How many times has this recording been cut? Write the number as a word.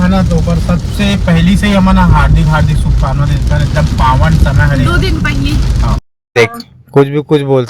one